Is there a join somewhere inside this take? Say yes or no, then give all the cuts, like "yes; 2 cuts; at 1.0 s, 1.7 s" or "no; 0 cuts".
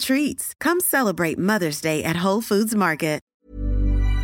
yes; 1 cut; at 3.3 s